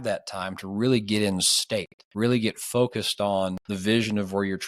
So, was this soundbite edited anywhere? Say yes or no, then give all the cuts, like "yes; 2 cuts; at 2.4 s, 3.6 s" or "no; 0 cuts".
yes; 2 cuts; at 2.0 s, 3.7 s